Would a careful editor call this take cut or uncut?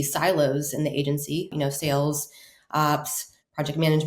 cut